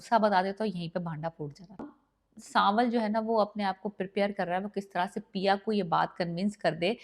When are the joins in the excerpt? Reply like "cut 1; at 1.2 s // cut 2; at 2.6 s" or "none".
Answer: cut 1; at 1.9 s